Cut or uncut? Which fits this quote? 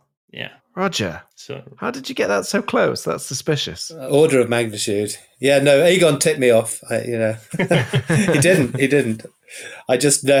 uncut